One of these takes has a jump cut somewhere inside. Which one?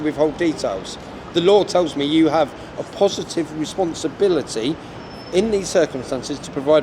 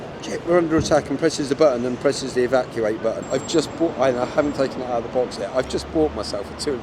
second; 1 cut; at 3.2 s

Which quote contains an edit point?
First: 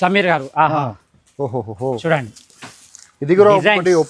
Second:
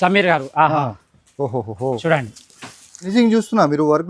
second; 1 cut; at 3.1 s

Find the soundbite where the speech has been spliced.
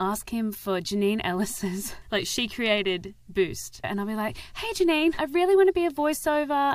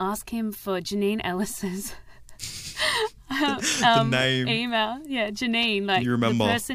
first; 2 cuts; at 1.9 s, 3.9 s

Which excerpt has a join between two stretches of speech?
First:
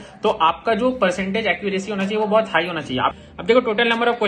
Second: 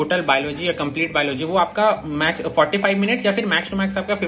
first; 1 cut; at 3.1 s

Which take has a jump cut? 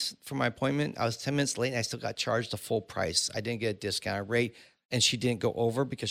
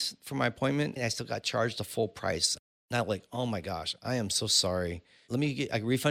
second; 3 cuts; at 1.0 s, 2.5 s, 5.2 s

